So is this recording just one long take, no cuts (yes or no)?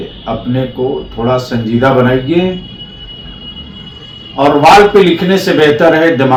yes